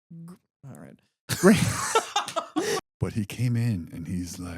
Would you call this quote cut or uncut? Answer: cut